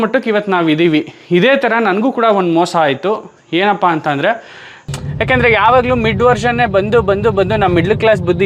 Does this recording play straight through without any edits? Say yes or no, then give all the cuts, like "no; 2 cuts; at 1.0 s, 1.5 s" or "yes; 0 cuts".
no; 1 cut; at 4.8 s